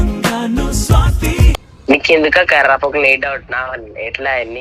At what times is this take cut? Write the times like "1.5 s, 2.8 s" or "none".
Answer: 1.7 s